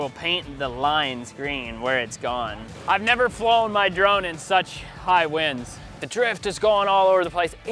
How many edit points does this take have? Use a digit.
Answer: 2